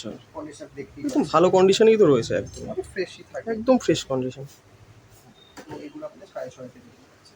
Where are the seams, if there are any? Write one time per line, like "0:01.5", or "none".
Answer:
none

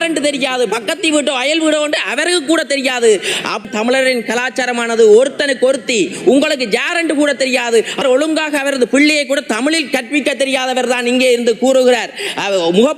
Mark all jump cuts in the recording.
0:03.7
0:08.0

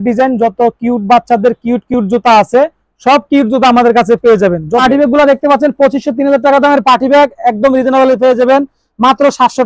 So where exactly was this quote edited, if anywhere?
0:04.8

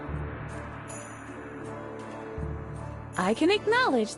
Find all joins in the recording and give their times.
0:03.1

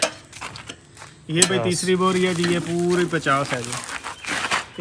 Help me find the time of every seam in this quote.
none

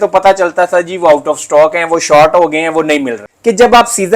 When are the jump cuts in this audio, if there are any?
0:03.3

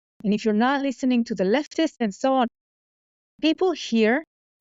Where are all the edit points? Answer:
0:02.0

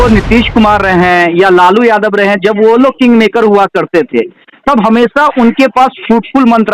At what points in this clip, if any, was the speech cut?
none

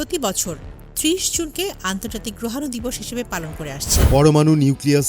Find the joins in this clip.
0:03.9

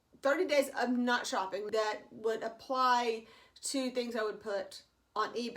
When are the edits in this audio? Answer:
0:01.6

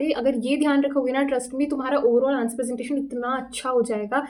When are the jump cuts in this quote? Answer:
none

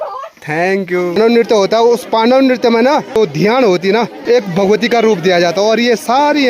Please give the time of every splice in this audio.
0:01.2
0:04.1

